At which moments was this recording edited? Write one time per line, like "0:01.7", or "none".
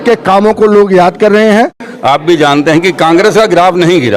0:01.9